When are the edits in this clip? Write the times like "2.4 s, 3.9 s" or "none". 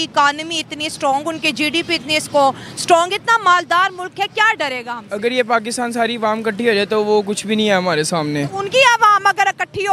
none